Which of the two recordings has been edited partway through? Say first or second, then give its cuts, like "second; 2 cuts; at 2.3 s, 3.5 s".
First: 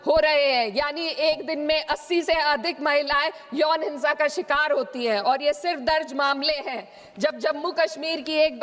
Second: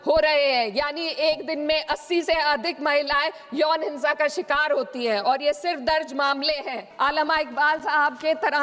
second; 1 cut; at 6.8 s